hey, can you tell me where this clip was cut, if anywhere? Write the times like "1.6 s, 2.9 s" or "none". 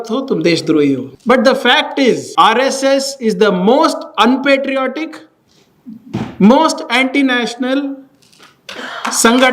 1.1 s, 2.3 s